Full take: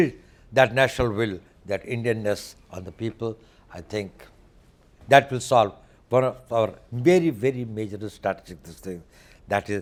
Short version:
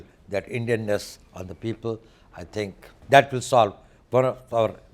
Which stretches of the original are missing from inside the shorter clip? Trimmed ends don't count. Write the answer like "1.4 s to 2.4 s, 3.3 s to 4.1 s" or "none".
4.2 s to 4.9 s